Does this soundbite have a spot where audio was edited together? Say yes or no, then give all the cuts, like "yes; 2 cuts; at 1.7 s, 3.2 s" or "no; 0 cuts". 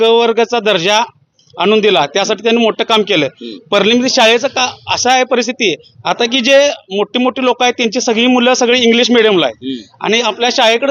no; 0 cuts